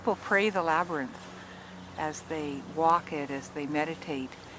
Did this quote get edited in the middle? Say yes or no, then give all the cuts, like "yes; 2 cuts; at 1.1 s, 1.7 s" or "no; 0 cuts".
no; 0 cuts